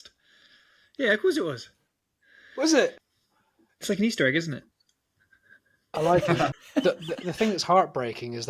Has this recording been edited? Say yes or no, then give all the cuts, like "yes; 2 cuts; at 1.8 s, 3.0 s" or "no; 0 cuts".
yes; 2 cuts; at 3.0 s, 6.6 s